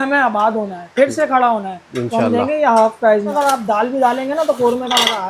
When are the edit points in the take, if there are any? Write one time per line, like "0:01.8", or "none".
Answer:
0:03.3